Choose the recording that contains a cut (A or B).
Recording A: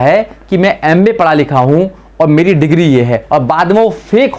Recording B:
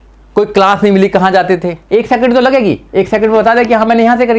B